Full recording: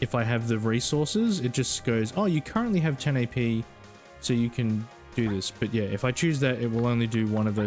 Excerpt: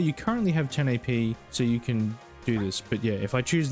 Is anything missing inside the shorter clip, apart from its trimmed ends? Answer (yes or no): yes